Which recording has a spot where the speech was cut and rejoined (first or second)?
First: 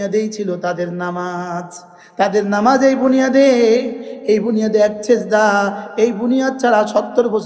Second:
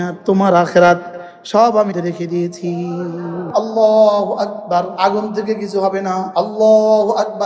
second